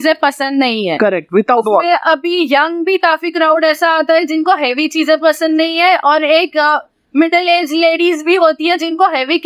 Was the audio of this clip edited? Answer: no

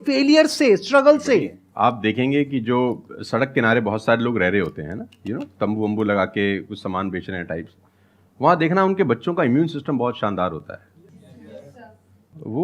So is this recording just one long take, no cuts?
no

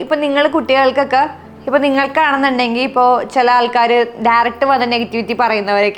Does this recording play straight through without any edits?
yes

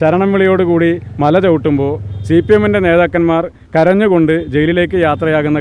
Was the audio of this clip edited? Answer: no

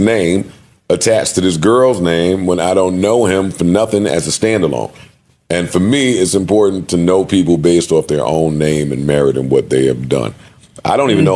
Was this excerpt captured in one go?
yes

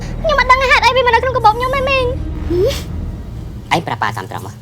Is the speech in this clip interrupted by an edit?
yes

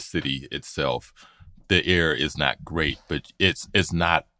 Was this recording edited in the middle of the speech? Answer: no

